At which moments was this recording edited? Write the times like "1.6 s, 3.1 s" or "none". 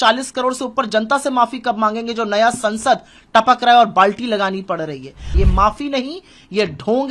5.2 s